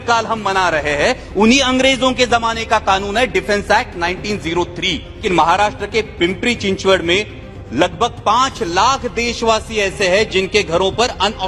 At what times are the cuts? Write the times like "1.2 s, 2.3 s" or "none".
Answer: 5.2 s